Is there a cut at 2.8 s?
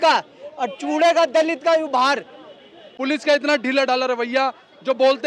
yes; 1 cut; at 2.8 s

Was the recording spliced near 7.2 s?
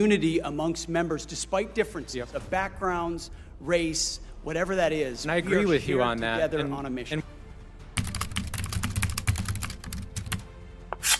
yes; 1 cut; at 7.2 s

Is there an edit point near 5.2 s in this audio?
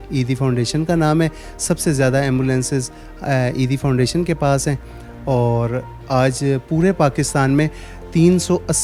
no; 0 cuts

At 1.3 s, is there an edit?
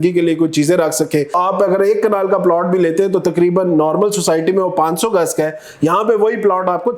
yes; 1 cut; at 1.3 s

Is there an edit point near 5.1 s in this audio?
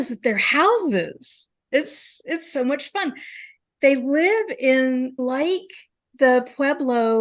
yes; 1 cut; at 5.1 s

